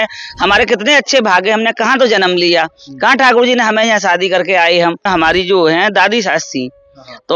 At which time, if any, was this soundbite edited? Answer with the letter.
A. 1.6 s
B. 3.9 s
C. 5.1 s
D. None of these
C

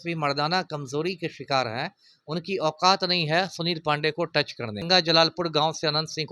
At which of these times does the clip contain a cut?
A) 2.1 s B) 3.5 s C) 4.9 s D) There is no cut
C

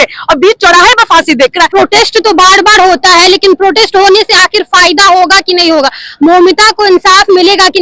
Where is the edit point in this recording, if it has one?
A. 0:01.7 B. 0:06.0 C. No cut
A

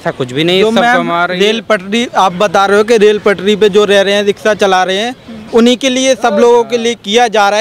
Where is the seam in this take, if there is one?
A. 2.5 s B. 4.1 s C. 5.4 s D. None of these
D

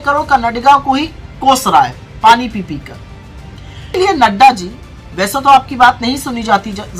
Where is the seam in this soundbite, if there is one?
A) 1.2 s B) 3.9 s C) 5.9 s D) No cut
B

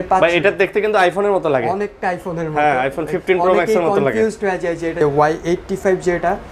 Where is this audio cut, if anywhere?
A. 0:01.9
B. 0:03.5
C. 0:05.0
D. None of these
C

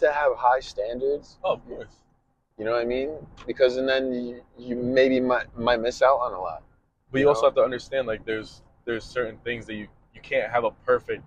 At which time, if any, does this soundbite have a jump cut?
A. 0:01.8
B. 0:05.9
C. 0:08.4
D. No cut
D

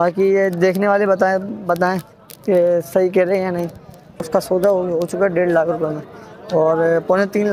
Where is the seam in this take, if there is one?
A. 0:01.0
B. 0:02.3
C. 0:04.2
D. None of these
C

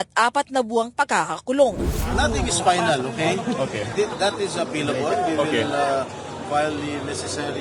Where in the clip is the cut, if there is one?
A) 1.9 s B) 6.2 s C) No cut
A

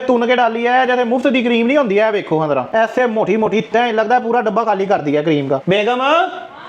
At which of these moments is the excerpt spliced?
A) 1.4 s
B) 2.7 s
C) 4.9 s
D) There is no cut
D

